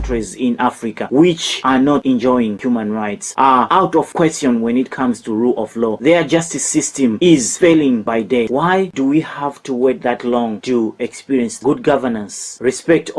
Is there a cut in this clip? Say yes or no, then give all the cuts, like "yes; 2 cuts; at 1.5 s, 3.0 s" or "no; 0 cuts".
yes; 3 cuts; at 2.6 s, 8.9 s, 11.6 s